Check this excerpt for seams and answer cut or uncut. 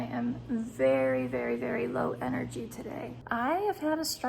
cut